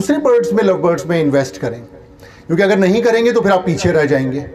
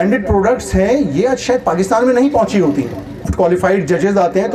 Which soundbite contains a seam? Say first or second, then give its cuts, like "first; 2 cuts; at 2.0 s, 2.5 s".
second; 1 cut; at 3.3 s